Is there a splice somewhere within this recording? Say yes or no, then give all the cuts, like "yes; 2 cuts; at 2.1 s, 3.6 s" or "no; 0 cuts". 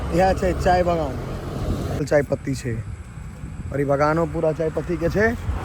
yes; 1 cut; at 2.0 s